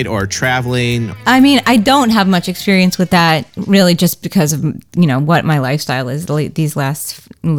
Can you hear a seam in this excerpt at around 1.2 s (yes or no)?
yes